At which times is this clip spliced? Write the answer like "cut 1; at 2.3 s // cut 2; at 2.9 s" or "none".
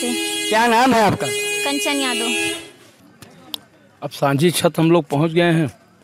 cut 1; at 2.9 s